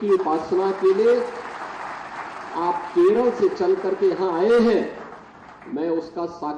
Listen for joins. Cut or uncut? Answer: uncut